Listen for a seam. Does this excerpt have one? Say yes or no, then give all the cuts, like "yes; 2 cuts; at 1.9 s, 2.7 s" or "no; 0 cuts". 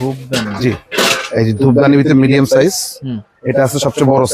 no; 0 cuts